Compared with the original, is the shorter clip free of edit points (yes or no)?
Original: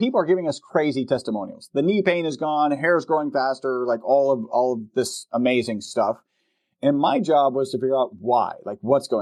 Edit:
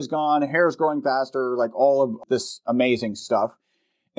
no